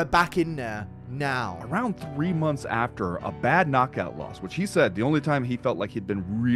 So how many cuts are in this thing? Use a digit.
1